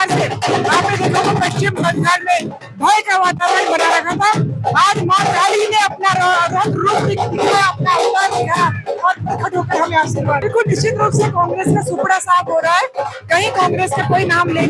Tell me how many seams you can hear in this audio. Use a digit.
1